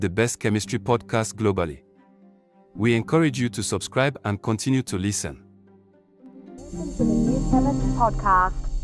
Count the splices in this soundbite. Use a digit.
0